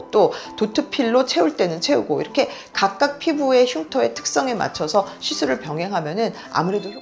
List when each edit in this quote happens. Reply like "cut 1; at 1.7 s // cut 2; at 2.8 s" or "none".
none